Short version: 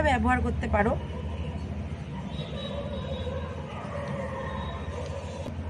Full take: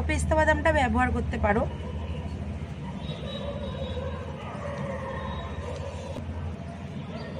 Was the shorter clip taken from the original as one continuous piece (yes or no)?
yes